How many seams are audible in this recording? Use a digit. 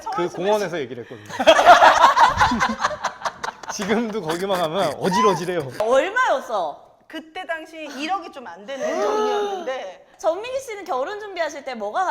2